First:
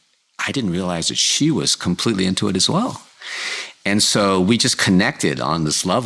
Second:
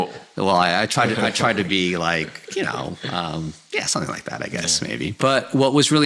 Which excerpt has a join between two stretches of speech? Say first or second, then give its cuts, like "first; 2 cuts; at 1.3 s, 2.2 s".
second; 1 cut; at 5.1 s